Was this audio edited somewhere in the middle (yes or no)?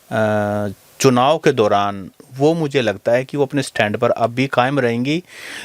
no